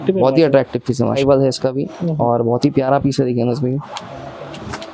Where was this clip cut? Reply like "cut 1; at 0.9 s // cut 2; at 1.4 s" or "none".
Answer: cut 1; at 1.1 s